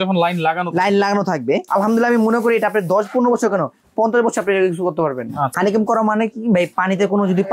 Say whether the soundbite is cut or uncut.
cut